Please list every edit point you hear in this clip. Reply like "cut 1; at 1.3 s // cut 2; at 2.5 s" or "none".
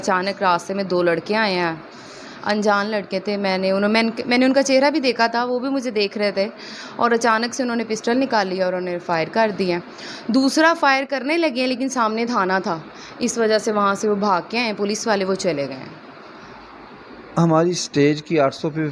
none